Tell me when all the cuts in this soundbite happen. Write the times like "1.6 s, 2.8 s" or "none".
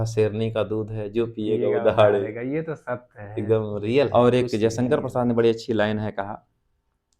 4.1 s